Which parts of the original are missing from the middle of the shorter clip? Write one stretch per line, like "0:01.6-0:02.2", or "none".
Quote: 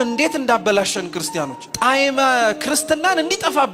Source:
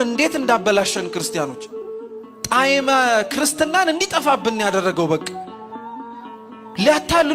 0:01.6-0:02.3